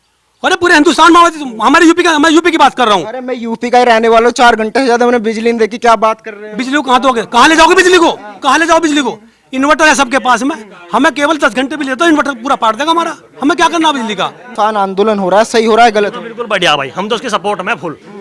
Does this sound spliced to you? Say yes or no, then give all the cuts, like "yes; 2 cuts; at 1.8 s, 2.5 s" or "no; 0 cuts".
yes; 1 cut; at 14.4 s